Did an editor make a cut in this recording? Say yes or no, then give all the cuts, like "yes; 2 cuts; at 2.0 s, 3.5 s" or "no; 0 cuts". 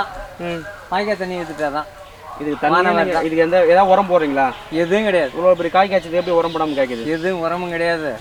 no; 0 cuts